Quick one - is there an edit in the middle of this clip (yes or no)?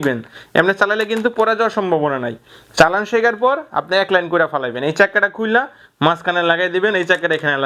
no